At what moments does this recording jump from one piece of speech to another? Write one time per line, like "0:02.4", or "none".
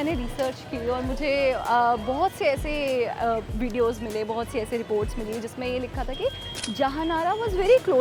none